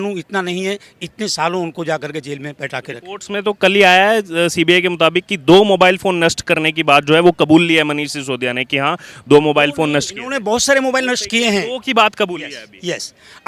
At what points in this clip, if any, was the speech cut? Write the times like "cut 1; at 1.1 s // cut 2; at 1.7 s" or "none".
none